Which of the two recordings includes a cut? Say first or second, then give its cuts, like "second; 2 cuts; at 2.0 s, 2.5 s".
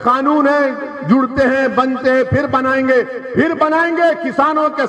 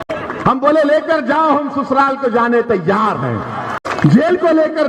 second; 1 cut; at 3.8 s